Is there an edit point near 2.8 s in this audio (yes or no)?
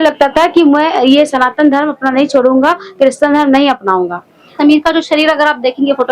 no